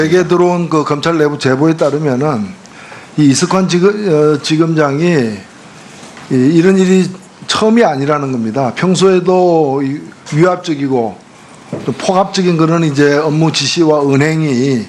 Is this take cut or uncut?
cut